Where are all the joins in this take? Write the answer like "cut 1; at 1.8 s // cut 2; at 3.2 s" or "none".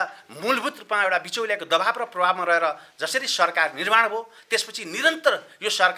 none

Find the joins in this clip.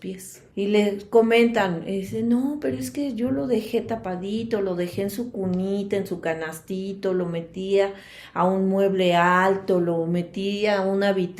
none

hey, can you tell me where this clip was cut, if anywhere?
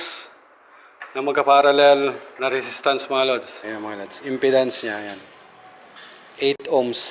cut 1; at 2.3 s // cut 2; at 3.5 s

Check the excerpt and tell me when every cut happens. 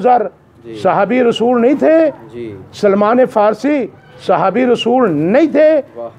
none

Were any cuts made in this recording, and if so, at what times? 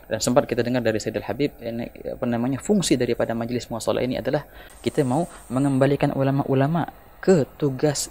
none

